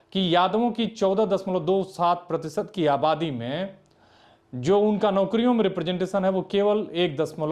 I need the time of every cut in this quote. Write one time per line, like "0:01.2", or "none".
none